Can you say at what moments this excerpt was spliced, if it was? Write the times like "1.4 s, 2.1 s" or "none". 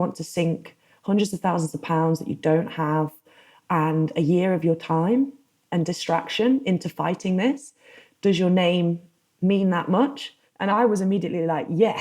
10.7 s